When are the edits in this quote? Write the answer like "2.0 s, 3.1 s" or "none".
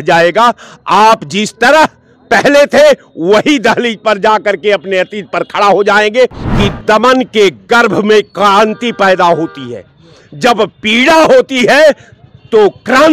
6.4 s